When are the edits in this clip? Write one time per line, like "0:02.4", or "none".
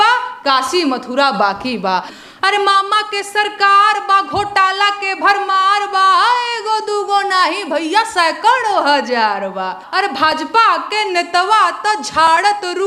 0:02.2
0:09.8